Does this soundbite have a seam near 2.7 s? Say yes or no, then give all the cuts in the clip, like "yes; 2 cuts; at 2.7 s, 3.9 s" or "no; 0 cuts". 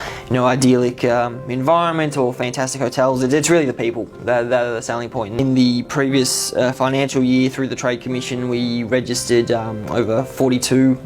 no; 1 cut; at 5.4 s